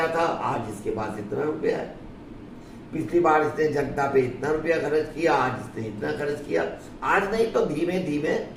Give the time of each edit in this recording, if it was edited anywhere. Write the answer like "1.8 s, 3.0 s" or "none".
none